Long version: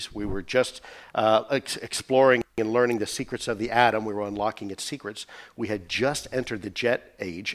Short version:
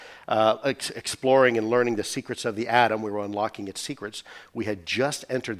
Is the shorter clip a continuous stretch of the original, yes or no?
no